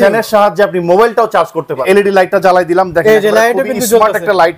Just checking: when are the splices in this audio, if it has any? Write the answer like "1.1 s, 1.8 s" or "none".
1.8 s